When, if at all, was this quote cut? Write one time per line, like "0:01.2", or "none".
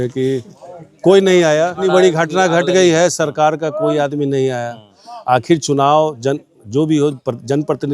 0:01.8